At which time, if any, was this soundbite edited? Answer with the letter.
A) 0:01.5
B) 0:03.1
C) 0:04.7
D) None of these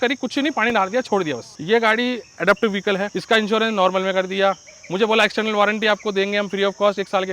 A